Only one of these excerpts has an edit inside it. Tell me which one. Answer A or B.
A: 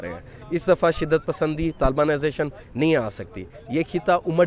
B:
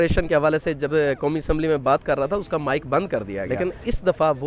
B